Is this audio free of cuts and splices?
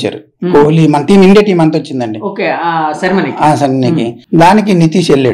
no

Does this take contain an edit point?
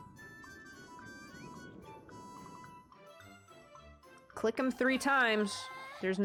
no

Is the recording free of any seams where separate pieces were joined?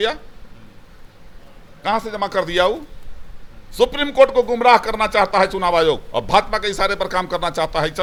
yes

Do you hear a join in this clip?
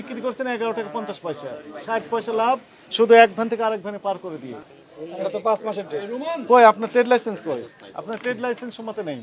no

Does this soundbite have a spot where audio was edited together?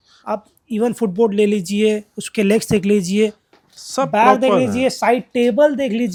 no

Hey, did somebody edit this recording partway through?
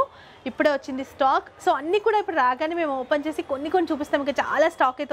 no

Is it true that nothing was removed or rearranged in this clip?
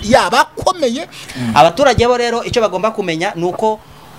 no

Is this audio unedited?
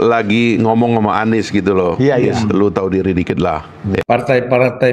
no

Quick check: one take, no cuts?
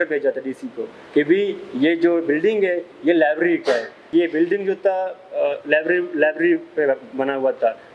no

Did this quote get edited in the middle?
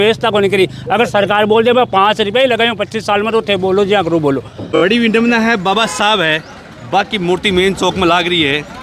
yes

